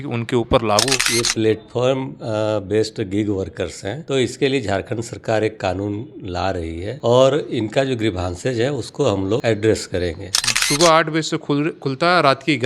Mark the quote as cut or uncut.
cut